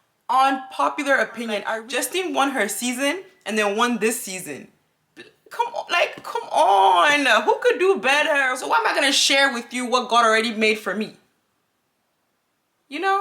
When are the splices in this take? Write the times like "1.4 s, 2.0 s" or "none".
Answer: 1.8 s, 8.5 s